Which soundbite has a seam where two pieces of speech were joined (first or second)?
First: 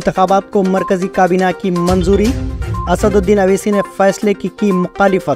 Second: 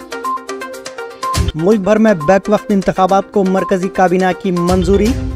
second